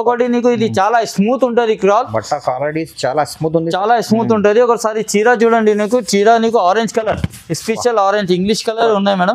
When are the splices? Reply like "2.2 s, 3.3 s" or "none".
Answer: none